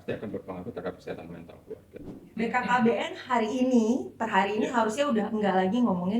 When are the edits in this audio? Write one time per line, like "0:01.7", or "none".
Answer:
0:02.3